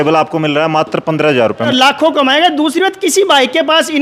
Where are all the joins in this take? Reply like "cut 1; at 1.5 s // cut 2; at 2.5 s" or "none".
cut 1; at 1.7 s